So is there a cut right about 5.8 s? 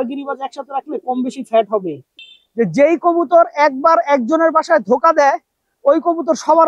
no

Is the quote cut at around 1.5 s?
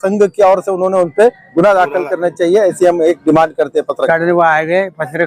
no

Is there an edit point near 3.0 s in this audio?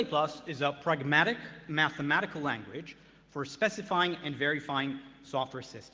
no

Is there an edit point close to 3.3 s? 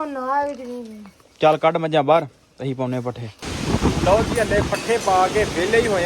yes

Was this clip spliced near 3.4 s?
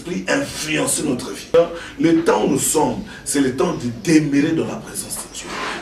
no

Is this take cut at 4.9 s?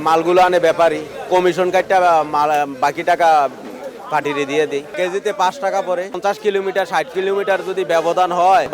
yes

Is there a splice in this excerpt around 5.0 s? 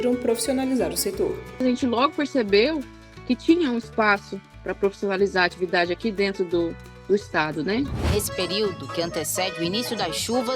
no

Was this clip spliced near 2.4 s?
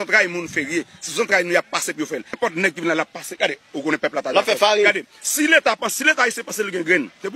yes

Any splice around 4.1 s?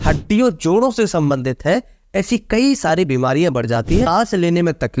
yes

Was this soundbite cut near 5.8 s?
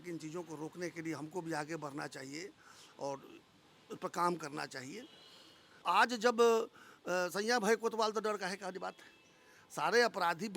yes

